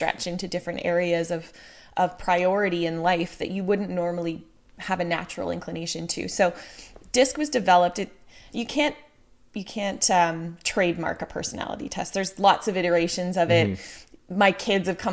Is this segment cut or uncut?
uncut